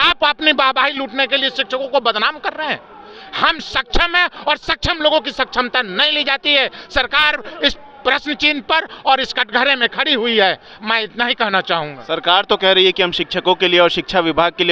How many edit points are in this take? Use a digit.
0